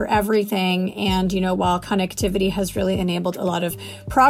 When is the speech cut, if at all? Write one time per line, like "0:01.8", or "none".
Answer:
none